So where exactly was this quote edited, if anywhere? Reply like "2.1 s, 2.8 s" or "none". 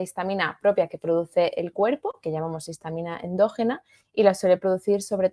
2.2 s